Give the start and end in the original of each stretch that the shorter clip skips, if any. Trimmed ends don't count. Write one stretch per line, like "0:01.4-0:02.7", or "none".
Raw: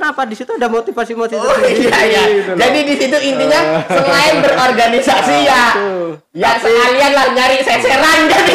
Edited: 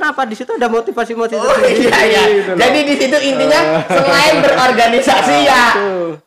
none